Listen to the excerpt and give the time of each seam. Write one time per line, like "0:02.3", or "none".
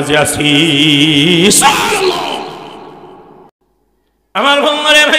0:03.5